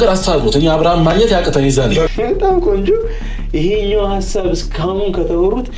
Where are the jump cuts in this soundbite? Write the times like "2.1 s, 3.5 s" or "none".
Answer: 2.1 s